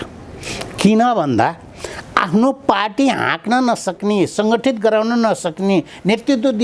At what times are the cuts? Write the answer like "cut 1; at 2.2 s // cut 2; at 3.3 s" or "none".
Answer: none